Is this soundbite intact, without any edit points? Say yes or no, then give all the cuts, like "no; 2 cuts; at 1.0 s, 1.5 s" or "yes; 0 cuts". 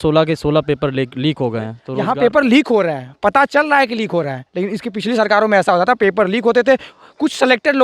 no; 1 cut; at 1.9 s